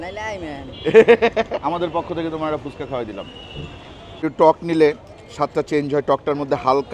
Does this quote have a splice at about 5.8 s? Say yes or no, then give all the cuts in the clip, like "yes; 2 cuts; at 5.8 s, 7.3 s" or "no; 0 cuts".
no; 2 cuts; at 1.5 s, 4.2 s